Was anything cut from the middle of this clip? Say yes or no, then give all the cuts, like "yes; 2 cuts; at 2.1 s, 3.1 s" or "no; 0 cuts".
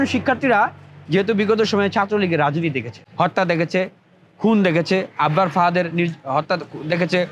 yes; 1 cut; at 3.0 s